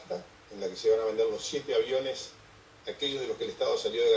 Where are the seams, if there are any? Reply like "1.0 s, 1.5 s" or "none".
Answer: none